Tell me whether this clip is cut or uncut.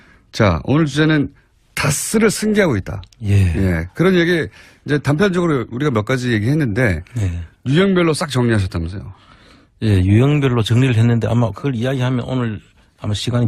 cut